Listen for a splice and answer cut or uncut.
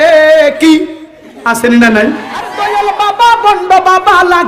cut